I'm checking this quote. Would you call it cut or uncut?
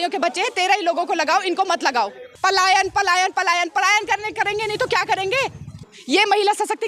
cut